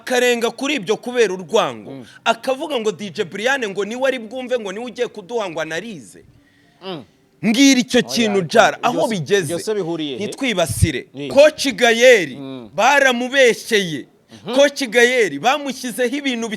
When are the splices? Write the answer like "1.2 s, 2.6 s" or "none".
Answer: 11.3 s